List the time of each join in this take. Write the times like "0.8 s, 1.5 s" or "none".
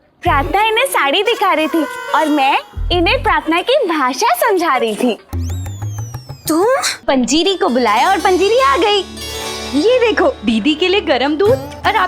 7.0 s